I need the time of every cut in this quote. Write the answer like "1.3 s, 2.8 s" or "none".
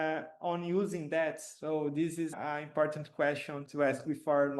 2.3 s, 3.6 s

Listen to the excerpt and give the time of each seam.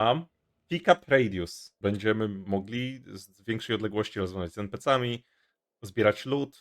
1.6 s

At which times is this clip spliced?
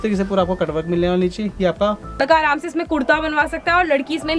2.2 s

